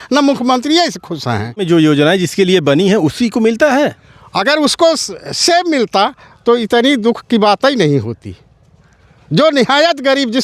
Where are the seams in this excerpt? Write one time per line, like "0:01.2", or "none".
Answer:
0:01.6

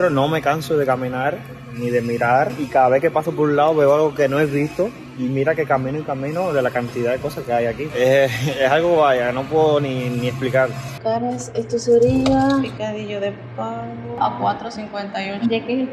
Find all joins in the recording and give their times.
none

